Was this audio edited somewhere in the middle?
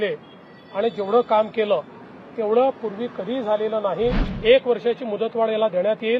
yes; 1 cut; at 4.3 s

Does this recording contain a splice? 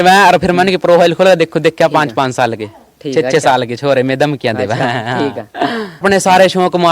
yes; 1 cut; at 6.0 s

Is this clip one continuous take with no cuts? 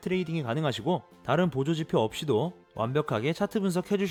yes; 0 cuts

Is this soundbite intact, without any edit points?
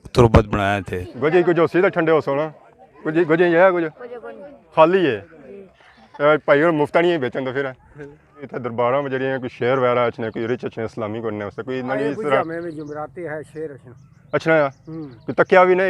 no; 2 cuts; at 1.0 s, 8.5 s

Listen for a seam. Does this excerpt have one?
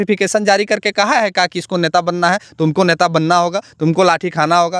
no; 0 cuts

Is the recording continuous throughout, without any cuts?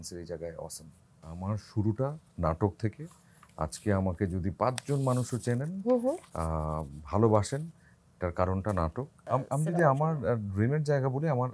no; 2 cuts; at 1.3 s, 9.3 s

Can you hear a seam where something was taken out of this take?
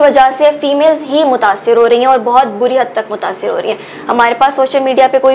no; 0 cuts

